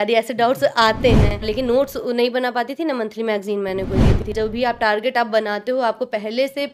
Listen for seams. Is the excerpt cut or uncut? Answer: cut